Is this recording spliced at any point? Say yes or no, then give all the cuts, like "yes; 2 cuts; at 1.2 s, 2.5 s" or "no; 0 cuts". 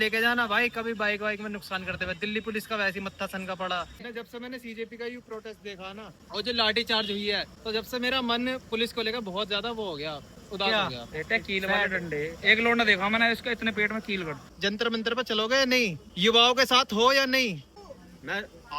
yes; 3 cuts; at 4.0 s, 14.4 s, 17.8 s